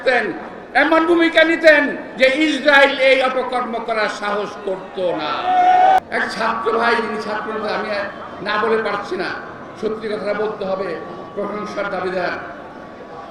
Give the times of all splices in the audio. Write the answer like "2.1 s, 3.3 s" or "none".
6.0 s